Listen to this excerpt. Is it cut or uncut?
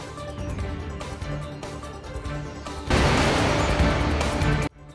cut